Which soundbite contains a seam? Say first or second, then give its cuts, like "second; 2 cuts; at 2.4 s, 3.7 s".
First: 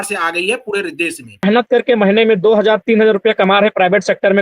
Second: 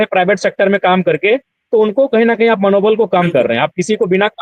first; 1 cut; at 1.4 s